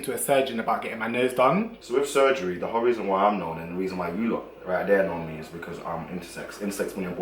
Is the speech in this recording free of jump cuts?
no; 1 cut; at 1.8 s

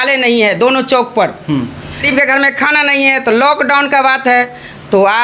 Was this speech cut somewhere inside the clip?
yes; 1 cut; at 2.0 s

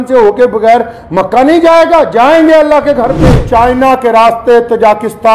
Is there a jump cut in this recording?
yes; 1 cut; at 3.3 s

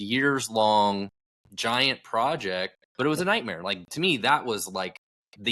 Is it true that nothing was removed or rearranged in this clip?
no; 1 cut; at 2.8 s

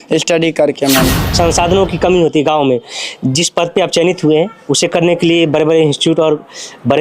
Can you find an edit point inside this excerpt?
yes; 1 cut; at 1.2 s

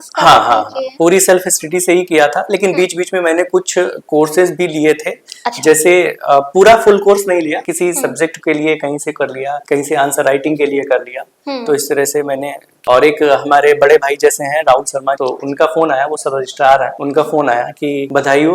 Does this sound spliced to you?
yes; 1 cut; at 12.8 s

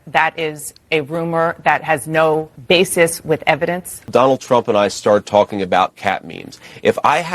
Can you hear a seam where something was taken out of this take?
yes; 1 cut; at 4.1 s

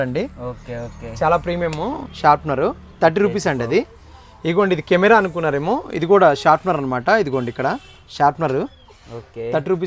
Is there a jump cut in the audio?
no; 0 cuts

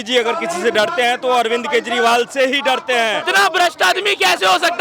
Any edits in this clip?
yes; 1 cut; at 3.3 s

